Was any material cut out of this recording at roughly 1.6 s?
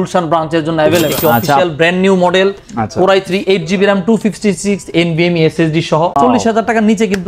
yes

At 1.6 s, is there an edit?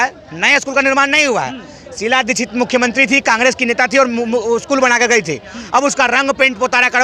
no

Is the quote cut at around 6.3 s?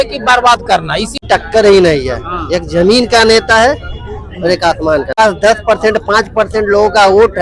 no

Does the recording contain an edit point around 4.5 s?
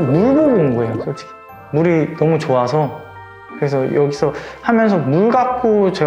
no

